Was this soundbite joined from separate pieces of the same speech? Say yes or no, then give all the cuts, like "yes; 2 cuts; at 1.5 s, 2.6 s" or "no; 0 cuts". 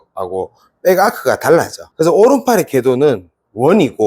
yes; 1 cut; at 1.8 s